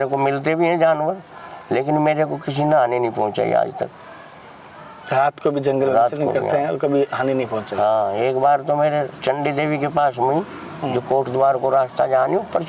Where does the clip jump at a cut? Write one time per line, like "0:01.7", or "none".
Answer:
none